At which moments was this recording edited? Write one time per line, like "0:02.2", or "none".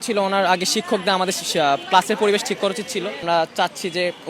0:03.2